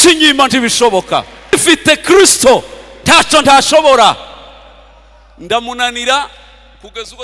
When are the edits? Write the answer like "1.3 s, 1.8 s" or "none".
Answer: 1.5 s